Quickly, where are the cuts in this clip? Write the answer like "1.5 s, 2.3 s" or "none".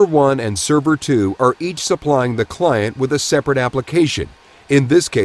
3.8 s